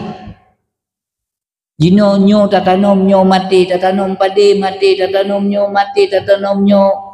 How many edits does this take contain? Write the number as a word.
zero